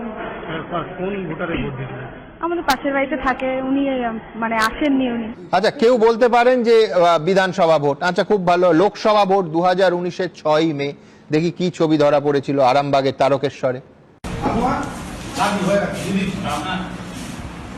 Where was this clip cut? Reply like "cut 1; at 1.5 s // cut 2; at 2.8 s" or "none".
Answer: none